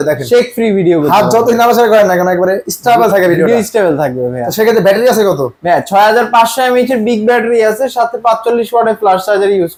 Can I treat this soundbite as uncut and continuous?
yes; 0 cuts

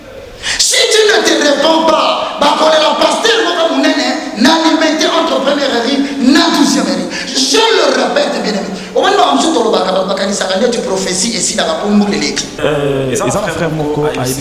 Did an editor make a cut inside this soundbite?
yes; 1 cut; at 12.6 s

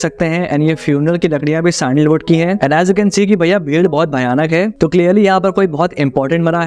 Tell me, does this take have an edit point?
no; 0 cuts

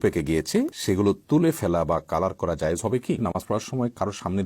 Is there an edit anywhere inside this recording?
yes; 1 cut; at 3.2 s

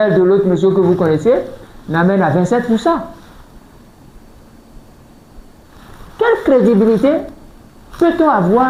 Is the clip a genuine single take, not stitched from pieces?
yes; 0 cuts

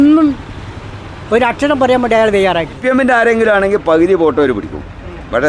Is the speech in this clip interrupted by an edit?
yes; 1 cut; at 2.8 s

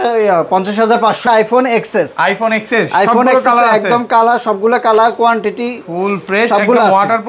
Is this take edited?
yes; 1 cut; at 1.2 s

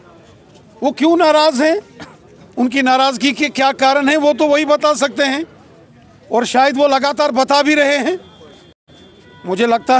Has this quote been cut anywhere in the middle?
no; 0 cuts

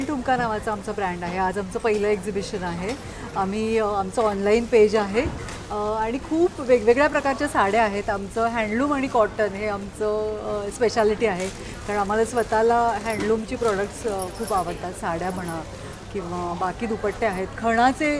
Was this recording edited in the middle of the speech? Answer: no; 0 cuts

